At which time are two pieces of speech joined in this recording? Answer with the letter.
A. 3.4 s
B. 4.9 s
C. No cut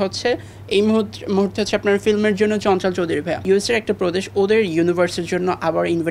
A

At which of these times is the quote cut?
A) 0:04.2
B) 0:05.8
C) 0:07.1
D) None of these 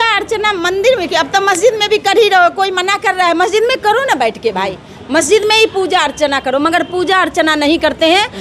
D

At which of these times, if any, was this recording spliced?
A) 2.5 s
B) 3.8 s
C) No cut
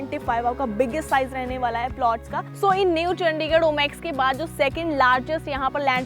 A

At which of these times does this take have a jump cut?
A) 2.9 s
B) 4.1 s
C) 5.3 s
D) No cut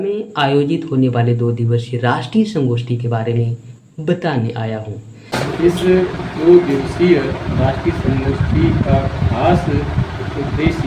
C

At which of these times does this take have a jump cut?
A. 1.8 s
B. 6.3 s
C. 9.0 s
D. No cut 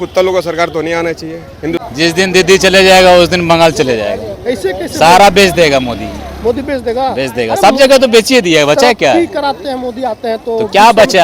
A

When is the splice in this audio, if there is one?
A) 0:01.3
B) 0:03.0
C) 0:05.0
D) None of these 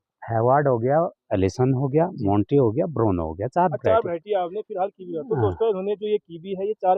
D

